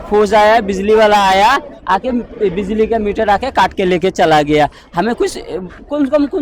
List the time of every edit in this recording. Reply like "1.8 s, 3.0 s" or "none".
none